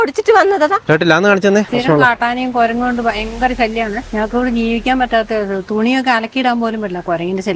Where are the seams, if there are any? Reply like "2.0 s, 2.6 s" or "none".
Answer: 1.7 s, 4.1 s